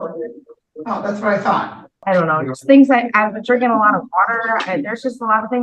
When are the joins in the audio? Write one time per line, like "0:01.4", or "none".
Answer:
0:01.9